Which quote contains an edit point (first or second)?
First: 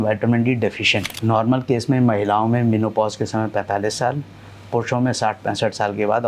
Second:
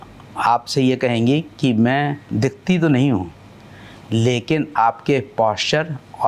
first